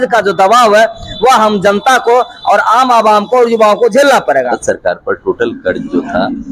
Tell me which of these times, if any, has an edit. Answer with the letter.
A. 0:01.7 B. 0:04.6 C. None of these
B